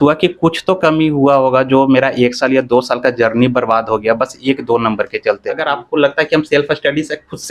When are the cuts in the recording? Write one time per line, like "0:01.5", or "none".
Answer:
0:05.6